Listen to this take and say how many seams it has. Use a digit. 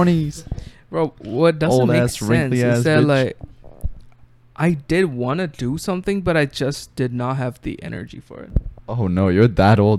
0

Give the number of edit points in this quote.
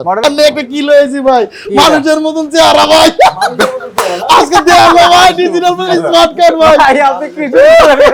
0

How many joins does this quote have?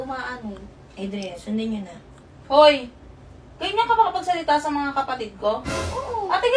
0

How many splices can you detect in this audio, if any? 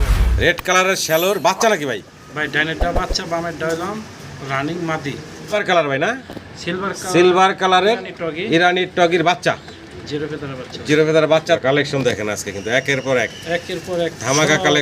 2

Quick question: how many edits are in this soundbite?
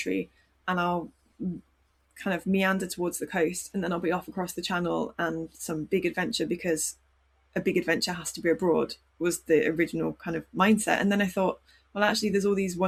0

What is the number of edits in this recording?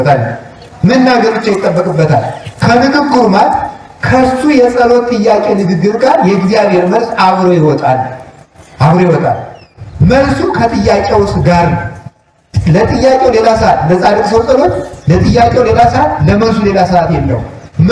0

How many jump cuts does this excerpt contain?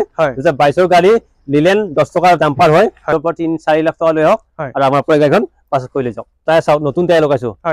2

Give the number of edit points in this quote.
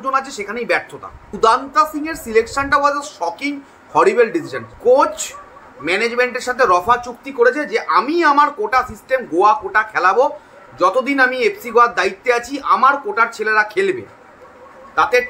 2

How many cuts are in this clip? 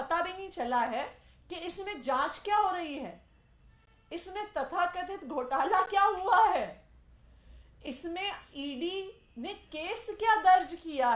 0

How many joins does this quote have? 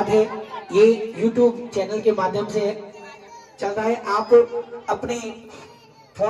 0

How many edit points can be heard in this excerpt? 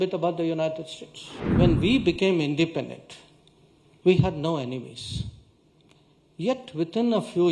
1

